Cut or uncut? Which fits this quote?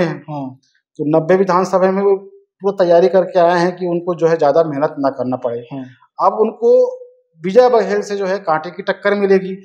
uncut